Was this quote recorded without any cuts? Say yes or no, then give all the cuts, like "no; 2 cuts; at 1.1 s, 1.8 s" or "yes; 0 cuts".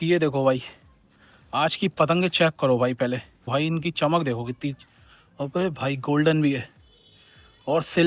no; 1 cut; at 3.5 s